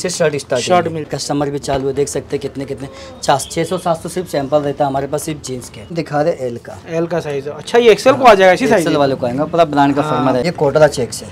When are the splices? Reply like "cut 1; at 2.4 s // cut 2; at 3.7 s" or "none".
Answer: cut 1; at 1.1 s // cut 2; at 5.9 s // cut 3; at 10.4 s